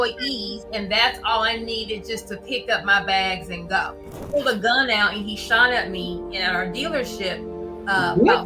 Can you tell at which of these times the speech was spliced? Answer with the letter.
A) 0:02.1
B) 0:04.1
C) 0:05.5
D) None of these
B